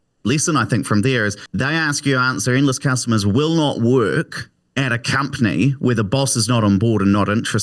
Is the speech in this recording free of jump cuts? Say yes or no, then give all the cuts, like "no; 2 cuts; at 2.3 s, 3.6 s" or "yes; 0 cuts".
no; 1 cut; at 1.4 s